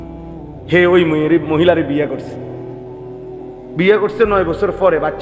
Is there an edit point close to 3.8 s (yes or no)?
yes